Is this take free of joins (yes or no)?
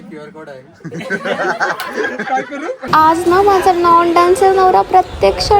no